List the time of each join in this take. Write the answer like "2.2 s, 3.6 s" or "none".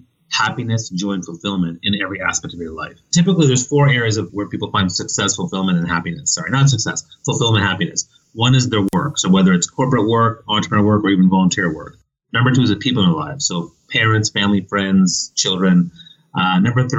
3.1 s, 4.3 s